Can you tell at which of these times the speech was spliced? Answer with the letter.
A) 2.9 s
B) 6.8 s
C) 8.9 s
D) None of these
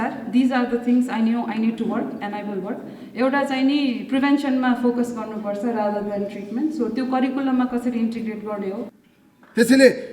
C